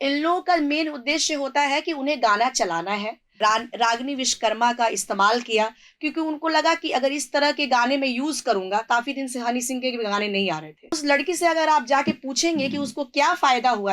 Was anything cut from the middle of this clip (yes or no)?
yes